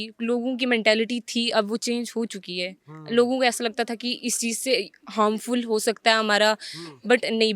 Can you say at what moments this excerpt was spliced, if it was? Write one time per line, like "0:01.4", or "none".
none